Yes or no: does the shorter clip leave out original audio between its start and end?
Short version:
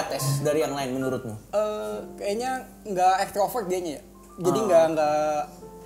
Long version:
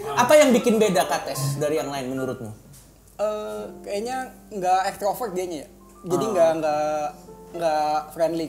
yes